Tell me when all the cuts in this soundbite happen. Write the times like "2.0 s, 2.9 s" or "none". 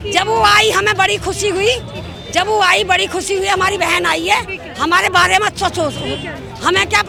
none